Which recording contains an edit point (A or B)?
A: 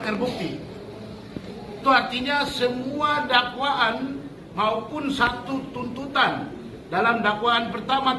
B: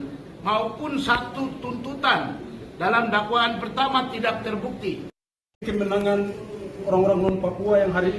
B